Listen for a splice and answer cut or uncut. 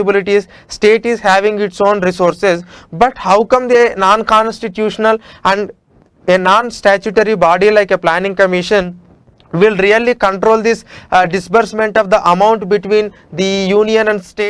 uncut